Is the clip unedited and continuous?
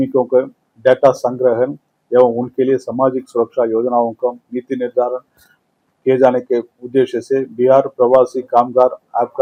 yes; 0 cuts

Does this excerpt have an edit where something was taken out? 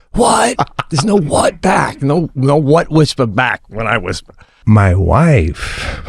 yes; 1 cut; at 4.6 s

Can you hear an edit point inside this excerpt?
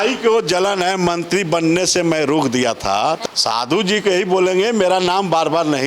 yes; 1 cut; at 3.2 s

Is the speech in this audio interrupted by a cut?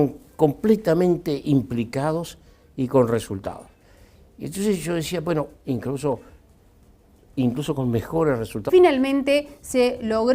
no; 0 cuts

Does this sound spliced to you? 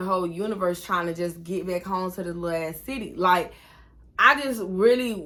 no; 0 cuts

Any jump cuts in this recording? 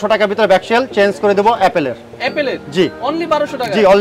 no; 0 cuts

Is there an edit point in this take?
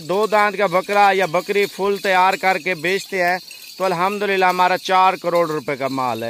no; 0 cuts

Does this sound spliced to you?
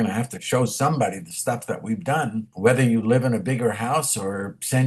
yes; 1 cut; at 2.5 s

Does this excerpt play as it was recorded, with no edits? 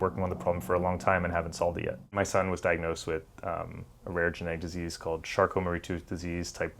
no; 1 cut; at 2.1 s

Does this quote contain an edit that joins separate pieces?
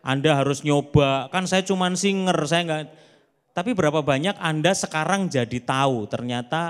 no; 0 cuts

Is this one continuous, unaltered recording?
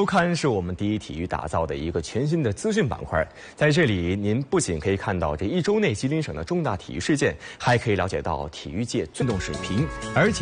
yes; 0 cuts

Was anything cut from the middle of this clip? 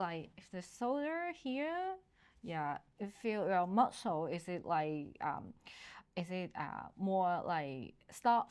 no; 0 cuts

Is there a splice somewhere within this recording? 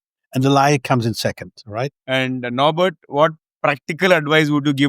yes; 1 cut; at 2.0 s

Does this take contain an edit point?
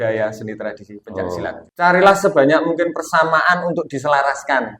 yes; 1 cut; at 1.6 s

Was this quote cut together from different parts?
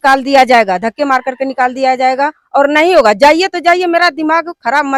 no; 0 cuts

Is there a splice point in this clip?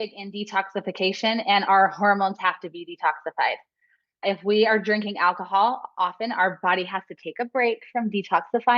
yes; 1 cut; at 4.2 s

